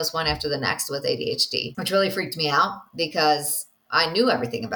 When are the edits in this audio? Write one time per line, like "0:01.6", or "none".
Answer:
0:01.7